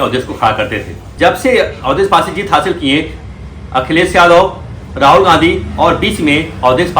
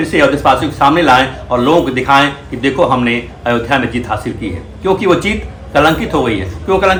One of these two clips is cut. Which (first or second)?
first